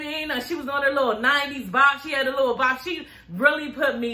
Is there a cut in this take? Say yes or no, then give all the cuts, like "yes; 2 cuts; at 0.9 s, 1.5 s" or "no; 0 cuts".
no; 0 cuts